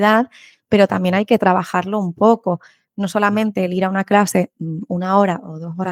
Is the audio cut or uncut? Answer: uncut